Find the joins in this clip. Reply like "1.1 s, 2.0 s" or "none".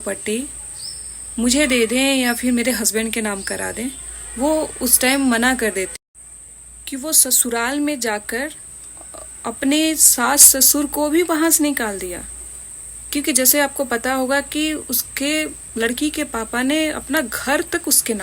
6.0 s